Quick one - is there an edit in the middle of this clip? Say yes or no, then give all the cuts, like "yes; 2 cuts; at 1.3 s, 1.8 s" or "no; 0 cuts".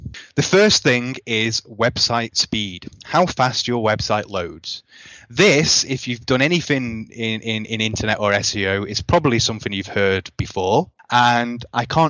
yes; 1 cut; at 11.0 s